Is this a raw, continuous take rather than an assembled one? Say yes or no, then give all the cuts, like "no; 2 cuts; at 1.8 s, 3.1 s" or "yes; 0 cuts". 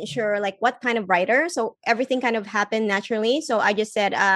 yes; 0 cuts